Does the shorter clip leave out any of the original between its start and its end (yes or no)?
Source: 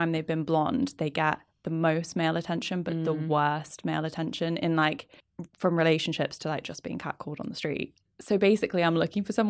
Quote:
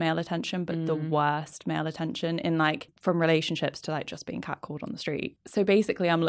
yes